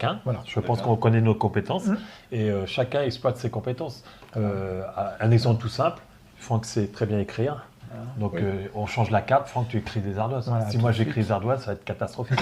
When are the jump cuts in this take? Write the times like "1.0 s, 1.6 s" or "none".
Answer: none